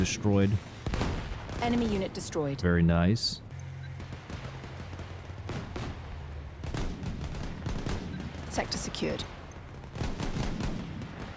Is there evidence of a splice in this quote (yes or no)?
yes